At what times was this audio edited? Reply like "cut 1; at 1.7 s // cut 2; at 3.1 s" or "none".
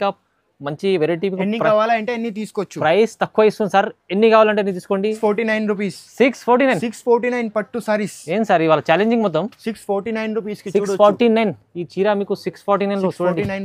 cut 1; at 5.2 s